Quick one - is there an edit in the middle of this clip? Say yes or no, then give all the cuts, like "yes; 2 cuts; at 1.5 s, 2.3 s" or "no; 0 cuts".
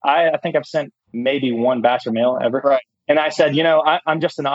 yes; 2 cuts; at 1.0 s, 2.9 s